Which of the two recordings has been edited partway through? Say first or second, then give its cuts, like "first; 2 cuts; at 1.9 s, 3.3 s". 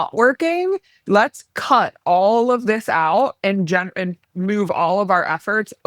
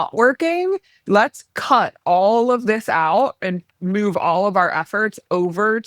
second; 1 cut; at 3.4 s